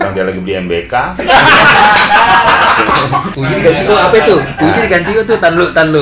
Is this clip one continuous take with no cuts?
no; 1 cut; at 3.3 s

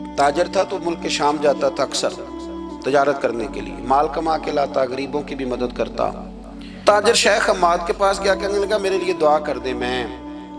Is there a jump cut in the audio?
yes; 1 cut; at 6.8 s

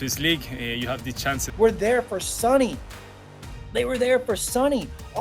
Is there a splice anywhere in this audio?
yes; 1 cut; at 1.5 s

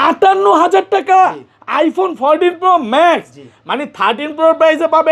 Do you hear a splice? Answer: no; 0 cuts

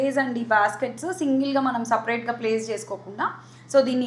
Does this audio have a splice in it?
no; 0 cuts

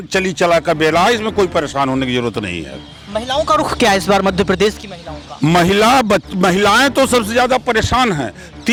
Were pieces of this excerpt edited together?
no; 0 cuts

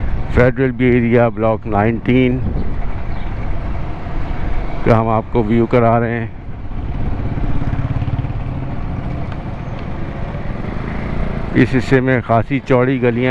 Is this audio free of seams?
yes; 0 cuts

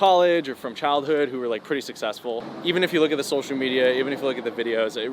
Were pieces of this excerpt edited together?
yes; 1 cut; at 2.5 s

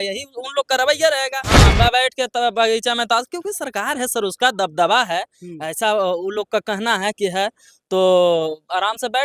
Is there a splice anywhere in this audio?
yes; 1 cut; at 1.7 s

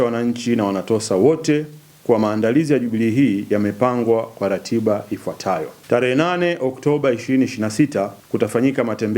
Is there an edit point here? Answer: yes; 2 cuts; at 5.7 s, 8.2 s

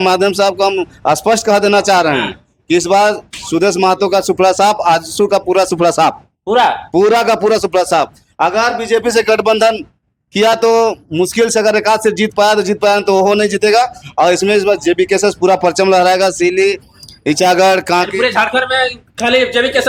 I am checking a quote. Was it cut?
no; 0 cuts

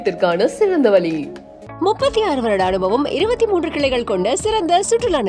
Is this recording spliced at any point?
no; 0 cuts

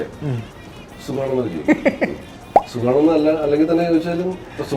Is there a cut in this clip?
no; 0 cuts

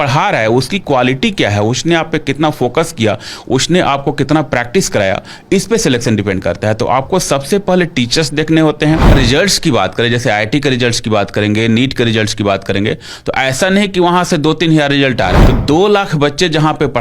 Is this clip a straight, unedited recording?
no; 2 cuts; at 9.1 s, 15.4 s

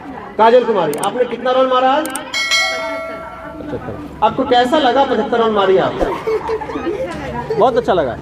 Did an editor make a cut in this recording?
no; 0 cuts

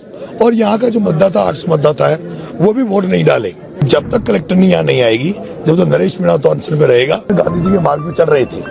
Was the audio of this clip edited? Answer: yes; 2 cuts; at 3.8 s, 7.3 s

